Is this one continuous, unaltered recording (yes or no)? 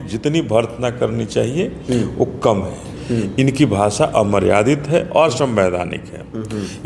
no